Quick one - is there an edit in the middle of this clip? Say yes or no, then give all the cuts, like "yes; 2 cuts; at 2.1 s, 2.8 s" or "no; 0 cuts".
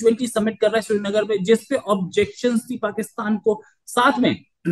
no; 0 cuts